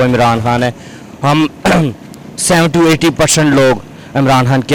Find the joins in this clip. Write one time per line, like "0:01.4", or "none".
none